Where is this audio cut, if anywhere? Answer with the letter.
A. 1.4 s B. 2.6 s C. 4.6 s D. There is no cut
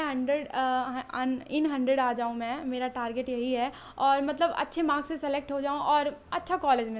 D